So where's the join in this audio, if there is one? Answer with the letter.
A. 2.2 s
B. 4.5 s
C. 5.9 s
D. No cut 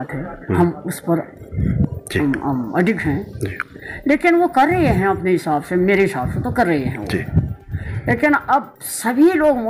D